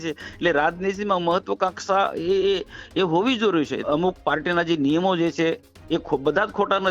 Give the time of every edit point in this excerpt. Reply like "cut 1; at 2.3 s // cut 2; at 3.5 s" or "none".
cut 1; at 3.8 s